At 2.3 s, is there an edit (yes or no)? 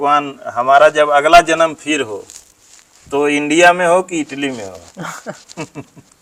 no